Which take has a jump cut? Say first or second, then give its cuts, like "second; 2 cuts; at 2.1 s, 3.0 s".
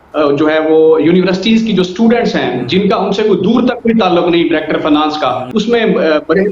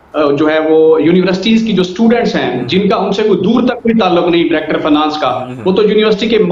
first; 1 cut; at 5.4 s